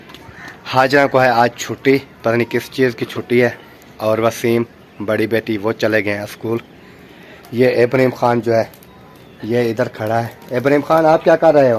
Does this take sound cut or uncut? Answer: uncut